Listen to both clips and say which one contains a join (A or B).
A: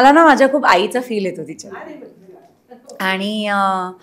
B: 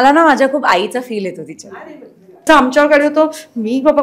B